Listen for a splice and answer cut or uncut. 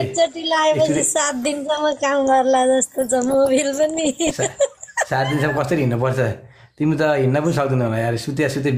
uncut